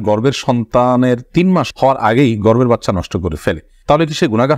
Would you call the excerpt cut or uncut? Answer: uncut